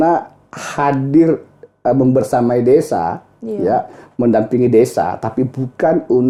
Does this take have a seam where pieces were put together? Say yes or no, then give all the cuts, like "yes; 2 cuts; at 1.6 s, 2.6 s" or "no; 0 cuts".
no; 0 cuts